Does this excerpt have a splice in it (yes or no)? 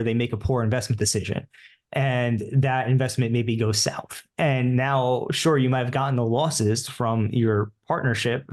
no